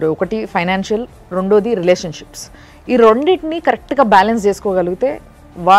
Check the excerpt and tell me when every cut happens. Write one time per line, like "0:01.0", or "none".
none